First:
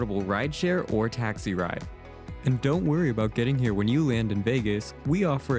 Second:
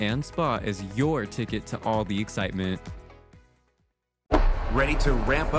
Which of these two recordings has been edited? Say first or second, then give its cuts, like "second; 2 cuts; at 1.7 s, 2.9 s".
second; 1 cut; at 4.1 s